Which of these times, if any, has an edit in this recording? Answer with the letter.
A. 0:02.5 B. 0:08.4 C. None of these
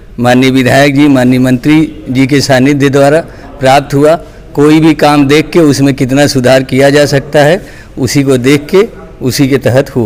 C